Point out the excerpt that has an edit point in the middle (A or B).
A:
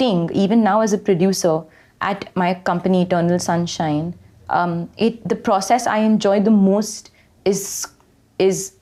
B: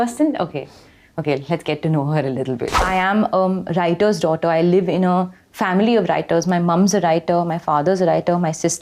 B